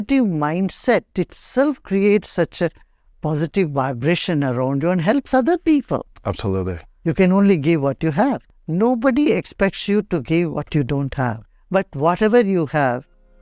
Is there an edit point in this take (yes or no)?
yes